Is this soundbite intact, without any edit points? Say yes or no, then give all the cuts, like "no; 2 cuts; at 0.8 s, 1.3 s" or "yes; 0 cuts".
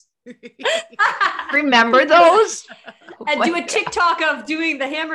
yes; 0 cuts